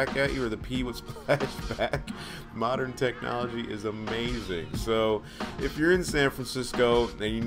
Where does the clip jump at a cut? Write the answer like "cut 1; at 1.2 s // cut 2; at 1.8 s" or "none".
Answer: none